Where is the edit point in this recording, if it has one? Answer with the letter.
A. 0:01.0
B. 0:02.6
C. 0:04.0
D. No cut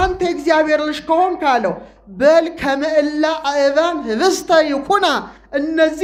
D